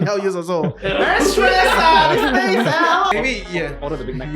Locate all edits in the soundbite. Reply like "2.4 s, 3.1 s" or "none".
3.1 s